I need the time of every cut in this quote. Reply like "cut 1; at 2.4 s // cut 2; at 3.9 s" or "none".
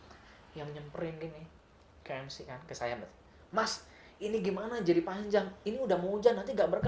none